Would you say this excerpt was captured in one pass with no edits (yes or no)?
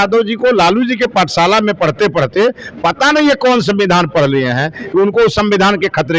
yes